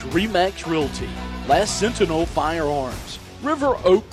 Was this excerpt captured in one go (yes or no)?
yes